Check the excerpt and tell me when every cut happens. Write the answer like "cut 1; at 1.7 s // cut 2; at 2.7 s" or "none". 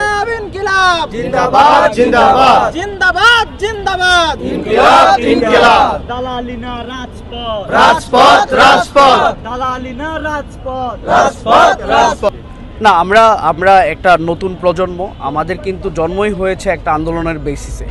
cut 1; at 12.3 s